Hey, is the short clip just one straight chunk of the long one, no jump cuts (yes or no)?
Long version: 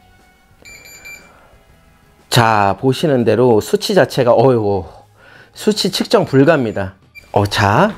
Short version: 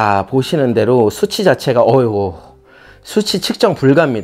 yes